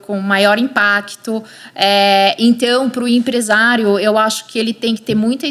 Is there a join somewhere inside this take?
no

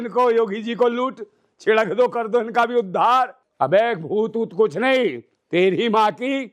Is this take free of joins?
no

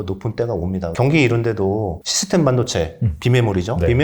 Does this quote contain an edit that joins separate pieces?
yes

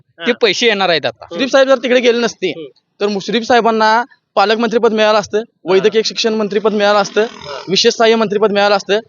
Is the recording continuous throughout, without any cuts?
no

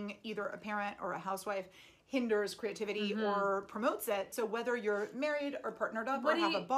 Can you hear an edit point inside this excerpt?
yes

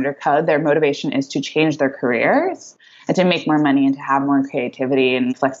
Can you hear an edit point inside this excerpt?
no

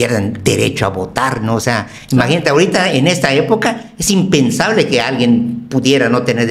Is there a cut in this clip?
no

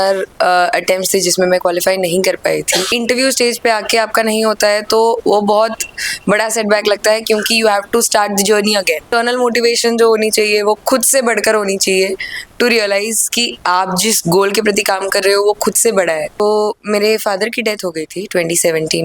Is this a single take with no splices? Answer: no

